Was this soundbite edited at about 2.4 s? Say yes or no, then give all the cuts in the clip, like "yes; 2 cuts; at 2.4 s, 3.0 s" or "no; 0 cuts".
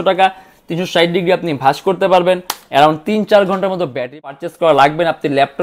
no; 1 cut; at 4.3 s